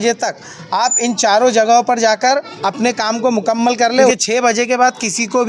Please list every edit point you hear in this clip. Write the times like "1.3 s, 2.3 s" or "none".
4.1 s